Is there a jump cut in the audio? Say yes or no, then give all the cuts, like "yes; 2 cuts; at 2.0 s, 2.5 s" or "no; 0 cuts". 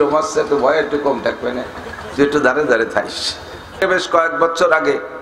yes; 1 cut; at 3.8 s